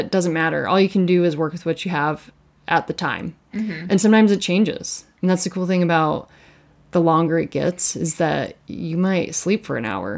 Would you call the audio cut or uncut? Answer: uncut